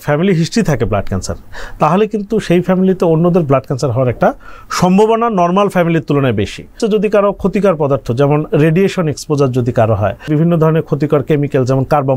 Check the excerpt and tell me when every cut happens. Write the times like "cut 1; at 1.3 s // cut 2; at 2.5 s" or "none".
cut 1; at 6.8 s // cut 2; at 10.3 s